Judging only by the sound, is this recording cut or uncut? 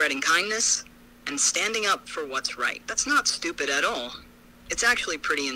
cut